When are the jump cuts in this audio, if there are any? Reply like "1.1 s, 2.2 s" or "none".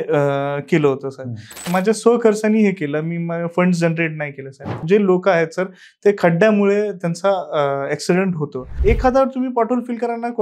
1.7 s, 4.8 s, 8.7 s